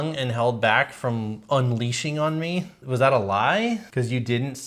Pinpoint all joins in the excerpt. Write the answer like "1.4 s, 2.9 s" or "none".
2.8 s, 3.9 s